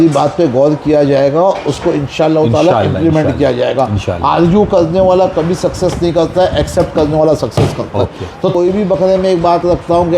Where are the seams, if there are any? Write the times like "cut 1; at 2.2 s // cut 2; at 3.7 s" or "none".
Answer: cut 1; at 8.5 s